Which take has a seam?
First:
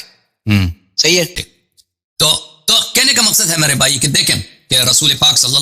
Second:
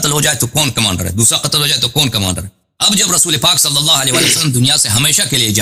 first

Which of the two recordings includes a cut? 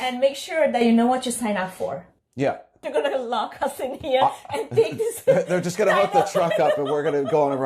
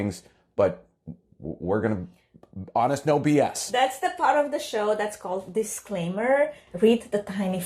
first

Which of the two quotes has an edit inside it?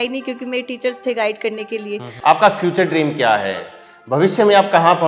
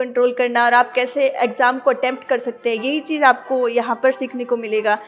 first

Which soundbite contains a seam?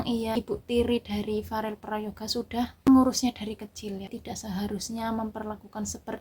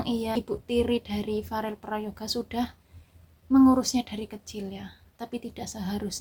first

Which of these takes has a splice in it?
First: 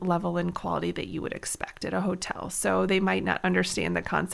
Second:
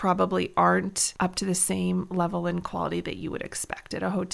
second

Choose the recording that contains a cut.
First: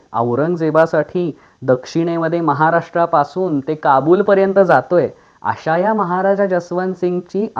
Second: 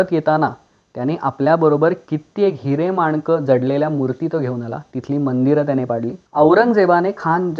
second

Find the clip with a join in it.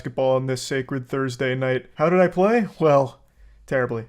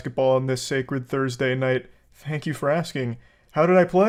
first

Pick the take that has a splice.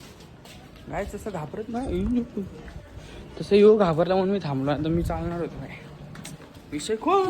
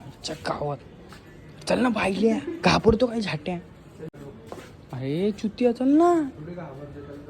second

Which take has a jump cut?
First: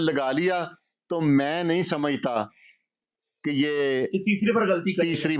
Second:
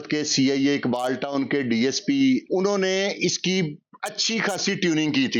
second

